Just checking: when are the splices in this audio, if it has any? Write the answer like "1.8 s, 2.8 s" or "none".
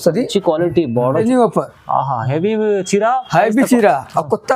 1.2 s